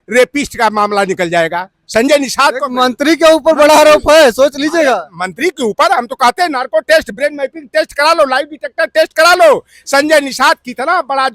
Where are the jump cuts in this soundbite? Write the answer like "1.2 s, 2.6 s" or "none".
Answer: none